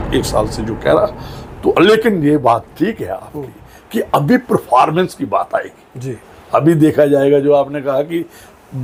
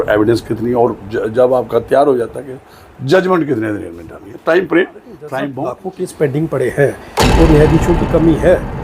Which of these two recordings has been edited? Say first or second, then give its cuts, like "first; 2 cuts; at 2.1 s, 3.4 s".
second; 1 cut; at 5.5 s